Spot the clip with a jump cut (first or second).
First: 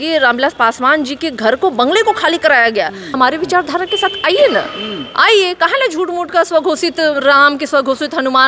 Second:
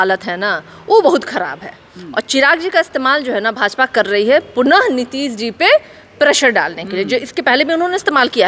first